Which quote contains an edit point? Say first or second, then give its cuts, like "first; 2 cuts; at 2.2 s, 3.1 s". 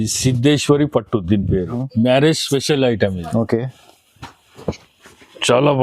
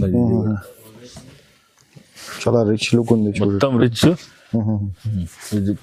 first; 1 cut; at 1.8 s